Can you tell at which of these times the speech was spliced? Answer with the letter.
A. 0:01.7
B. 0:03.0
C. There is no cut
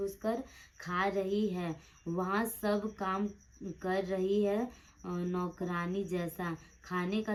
C